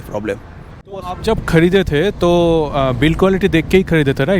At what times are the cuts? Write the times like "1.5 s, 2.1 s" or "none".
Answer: 1.0 s